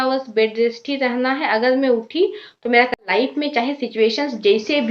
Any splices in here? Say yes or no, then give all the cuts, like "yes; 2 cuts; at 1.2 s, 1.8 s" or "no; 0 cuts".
yes; 1 cut; at 3.1 s